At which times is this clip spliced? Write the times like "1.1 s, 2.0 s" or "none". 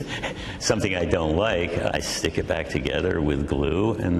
1.9 s